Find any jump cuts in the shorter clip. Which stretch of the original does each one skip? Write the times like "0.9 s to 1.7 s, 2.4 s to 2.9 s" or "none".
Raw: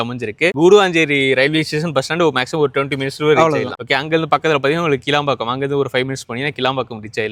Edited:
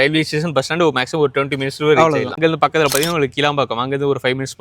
3.7 s to 4.0 s